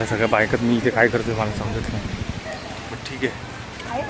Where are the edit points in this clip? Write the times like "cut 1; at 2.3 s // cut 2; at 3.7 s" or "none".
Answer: none